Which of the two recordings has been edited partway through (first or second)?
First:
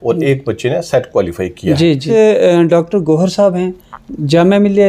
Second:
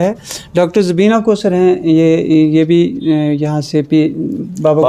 first